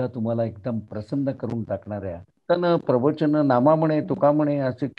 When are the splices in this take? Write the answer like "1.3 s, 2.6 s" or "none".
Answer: 2.3 s